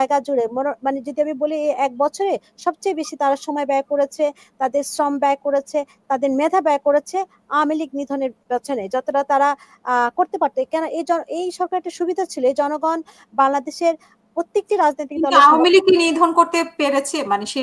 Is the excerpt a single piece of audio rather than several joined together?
yes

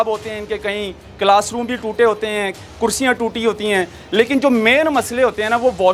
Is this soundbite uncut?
yes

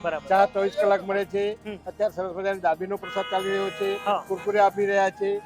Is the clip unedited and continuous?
yes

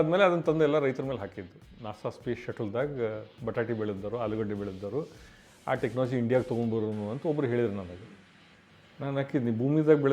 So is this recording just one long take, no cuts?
no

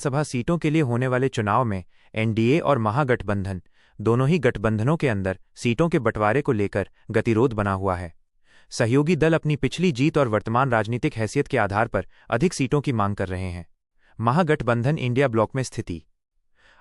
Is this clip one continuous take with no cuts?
yes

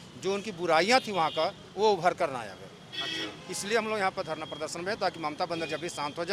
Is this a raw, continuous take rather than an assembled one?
yes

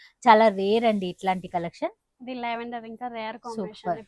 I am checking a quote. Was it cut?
no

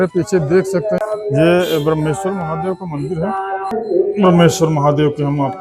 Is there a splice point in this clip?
yes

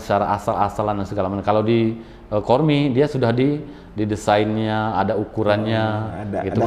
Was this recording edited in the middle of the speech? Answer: no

